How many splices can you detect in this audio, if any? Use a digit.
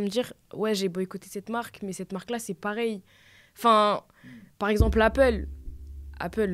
0